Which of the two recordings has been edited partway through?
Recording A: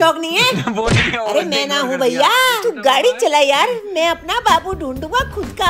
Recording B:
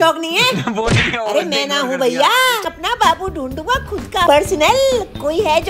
B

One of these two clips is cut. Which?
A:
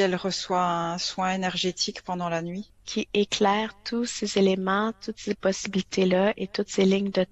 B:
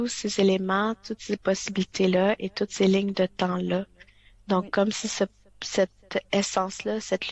A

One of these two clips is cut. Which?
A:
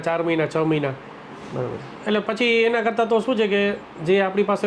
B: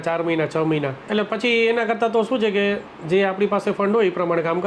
B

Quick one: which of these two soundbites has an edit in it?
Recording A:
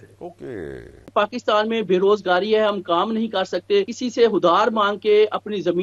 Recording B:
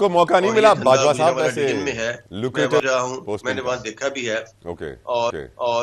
A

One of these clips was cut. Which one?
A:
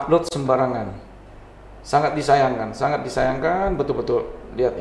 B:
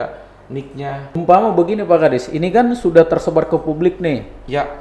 B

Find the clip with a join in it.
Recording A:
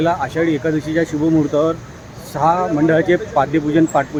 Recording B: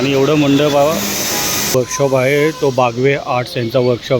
B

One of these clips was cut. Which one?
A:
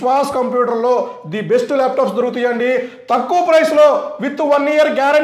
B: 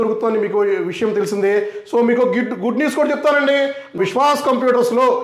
B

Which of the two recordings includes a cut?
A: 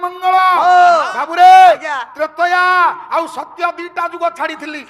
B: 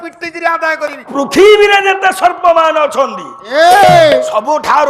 B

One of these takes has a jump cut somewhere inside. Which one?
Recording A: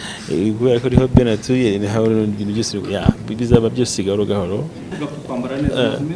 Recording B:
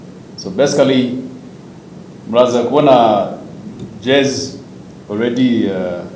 A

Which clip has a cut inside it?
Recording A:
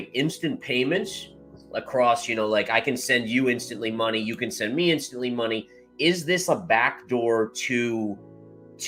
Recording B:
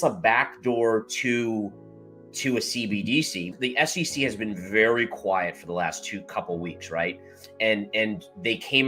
B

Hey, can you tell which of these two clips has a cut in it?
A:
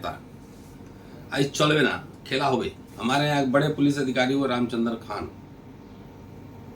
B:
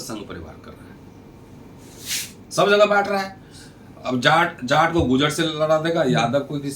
A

